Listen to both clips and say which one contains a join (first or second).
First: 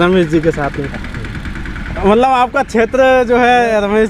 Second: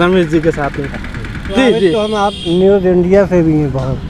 second